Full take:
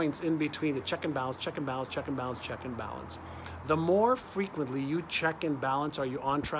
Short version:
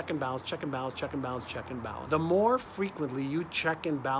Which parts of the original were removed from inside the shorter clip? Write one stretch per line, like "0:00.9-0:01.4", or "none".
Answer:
0:03.0-0:03.6